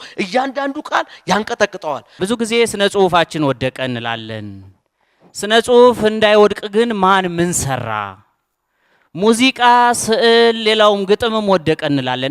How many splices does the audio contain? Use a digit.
1